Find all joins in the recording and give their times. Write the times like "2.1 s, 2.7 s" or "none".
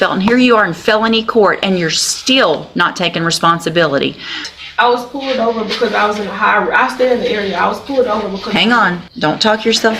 4.5 s, 9.1 s